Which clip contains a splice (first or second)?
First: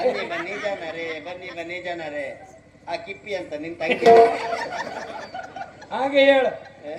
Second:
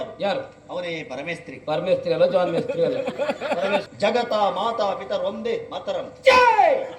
second